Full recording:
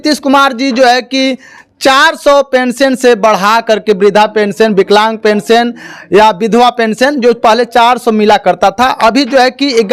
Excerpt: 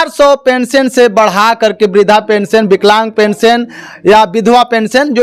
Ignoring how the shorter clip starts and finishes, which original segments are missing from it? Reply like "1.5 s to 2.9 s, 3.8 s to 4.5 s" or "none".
none